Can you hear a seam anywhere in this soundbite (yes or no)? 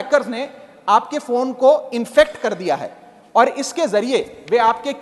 no